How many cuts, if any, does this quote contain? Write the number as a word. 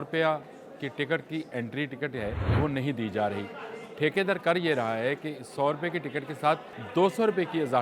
two